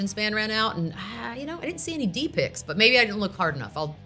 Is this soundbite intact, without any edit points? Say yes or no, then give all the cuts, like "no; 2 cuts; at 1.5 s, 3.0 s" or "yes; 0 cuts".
yes; 0 cuts